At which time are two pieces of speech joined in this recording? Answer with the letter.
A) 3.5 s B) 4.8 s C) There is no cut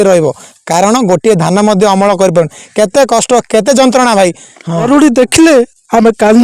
B